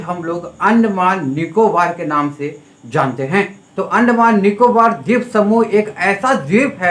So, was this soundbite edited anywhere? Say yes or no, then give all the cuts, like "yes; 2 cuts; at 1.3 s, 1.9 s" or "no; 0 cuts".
yes; 1 cut; at 3.7 s